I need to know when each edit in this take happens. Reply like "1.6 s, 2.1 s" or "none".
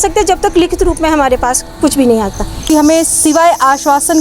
2.7 s